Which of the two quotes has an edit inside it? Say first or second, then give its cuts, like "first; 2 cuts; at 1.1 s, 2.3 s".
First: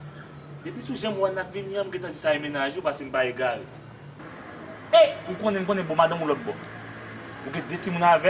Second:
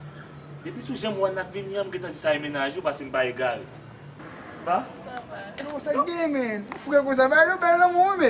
first; 1 cut; at 4.5 s